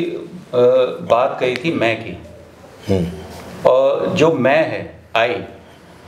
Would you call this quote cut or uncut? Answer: uncut